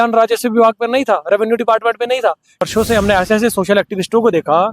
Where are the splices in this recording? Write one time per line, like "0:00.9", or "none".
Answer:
0:02.7